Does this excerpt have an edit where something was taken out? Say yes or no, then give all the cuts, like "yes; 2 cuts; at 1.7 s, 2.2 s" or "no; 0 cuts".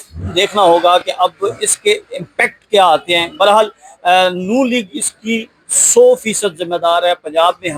no; 0 cuts